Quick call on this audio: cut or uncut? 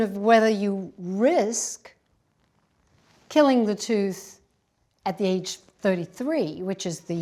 uncut